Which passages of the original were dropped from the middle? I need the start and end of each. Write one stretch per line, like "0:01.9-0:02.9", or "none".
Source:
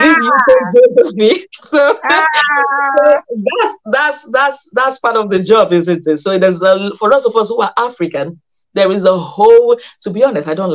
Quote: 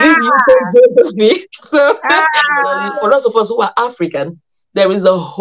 0:02.9-0:06.9